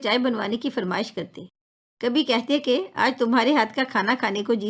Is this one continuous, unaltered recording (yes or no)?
yes